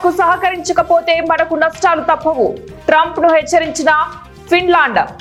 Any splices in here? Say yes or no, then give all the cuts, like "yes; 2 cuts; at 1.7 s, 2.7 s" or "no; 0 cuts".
no; 0 cuts